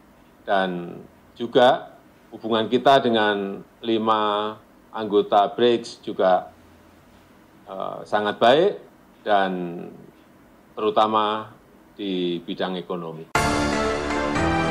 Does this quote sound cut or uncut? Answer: cut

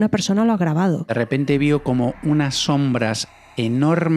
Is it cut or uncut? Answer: cut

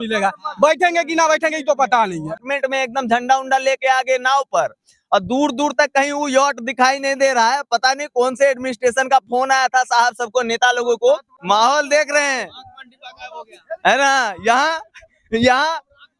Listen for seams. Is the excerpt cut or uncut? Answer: cut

